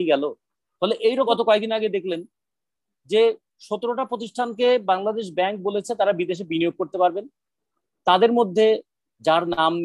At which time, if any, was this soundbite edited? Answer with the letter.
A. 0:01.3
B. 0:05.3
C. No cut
A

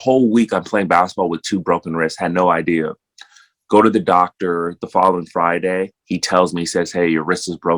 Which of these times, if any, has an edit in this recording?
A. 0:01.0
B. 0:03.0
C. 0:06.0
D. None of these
D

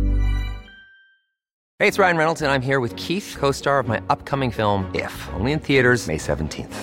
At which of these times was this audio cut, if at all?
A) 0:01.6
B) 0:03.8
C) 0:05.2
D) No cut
A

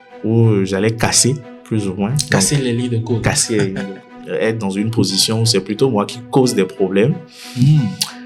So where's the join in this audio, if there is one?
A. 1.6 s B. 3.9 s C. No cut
B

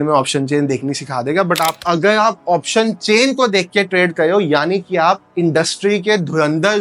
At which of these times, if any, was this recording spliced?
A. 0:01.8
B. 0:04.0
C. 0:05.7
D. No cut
A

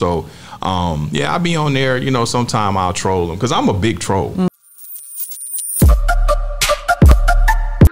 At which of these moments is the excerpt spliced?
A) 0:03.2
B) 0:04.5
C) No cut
B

